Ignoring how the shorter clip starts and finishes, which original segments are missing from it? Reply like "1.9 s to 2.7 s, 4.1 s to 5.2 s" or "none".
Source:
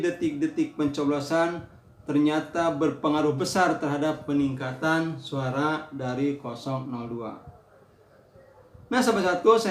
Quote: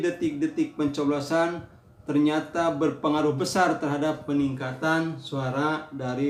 none